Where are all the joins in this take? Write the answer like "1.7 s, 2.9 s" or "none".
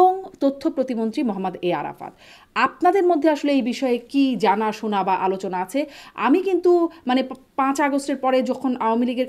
none